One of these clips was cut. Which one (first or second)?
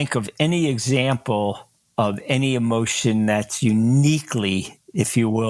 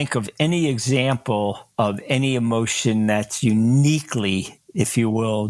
second